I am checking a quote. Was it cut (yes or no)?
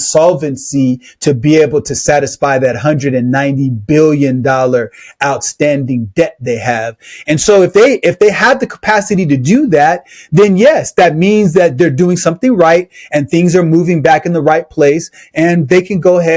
no